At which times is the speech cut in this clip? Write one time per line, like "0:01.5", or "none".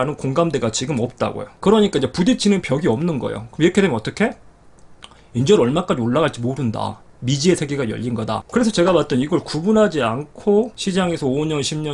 0:08.4